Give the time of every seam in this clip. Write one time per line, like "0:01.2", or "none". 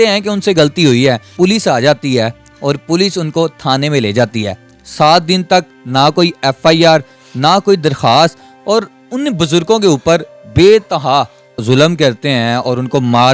0:01.3
0:11.6